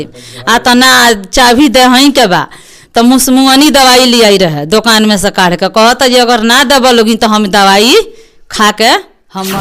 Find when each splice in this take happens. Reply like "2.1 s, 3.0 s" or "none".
none